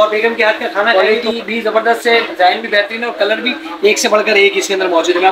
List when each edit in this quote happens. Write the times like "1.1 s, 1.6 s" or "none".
1.5 s